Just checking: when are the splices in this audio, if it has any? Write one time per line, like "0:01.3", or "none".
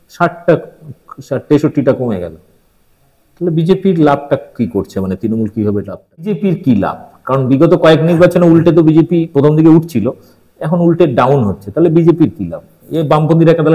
0:06.3